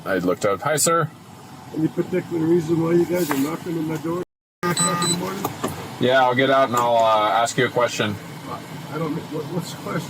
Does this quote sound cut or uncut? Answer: uncut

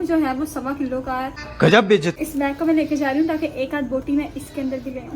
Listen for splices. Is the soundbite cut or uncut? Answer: cut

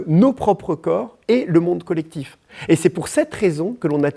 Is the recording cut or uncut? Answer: uncut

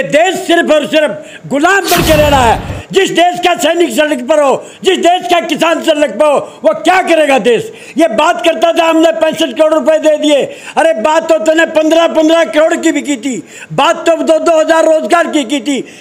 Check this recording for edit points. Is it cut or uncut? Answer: cut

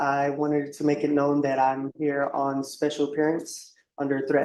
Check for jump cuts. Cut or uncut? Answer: uncut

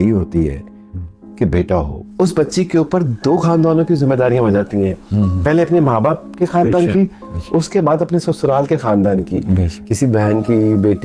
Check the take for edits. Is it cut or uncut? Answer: cut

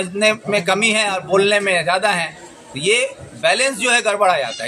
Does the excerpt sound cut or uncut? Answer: uncut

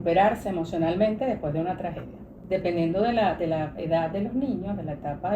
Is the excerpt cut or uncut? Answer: cut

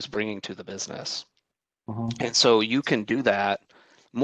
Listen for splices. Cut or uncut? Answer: uncut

